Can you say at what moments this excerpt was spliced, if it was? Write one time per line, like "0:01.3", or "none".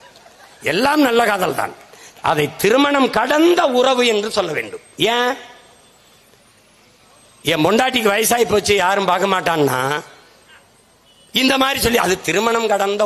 none